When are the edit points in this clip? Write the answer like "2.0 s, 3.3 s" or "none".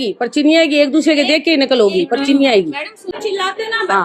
3.1 s